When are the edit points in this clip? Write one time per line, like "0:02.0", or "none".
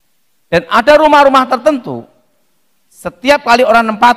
none